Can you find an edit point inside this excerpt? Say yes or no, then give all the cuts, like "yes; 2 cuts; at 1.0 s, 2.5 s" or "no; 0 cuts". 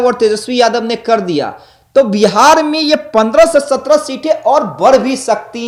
no; 0 cuts